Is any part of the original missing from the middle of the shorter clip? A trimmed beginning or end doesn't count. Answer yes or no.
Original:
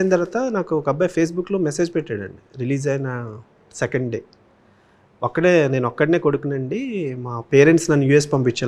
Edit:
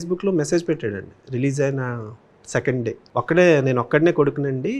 yes